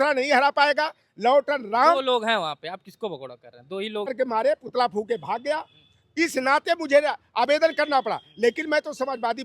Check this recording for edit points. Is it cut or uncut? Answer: cut